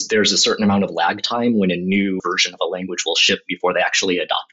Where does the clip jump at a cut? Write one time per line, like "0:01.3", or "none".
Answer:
0:02.2